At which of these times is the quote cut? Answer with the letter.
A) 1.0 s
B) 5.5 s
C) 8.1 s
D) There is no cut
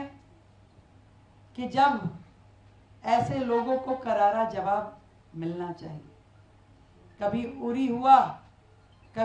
D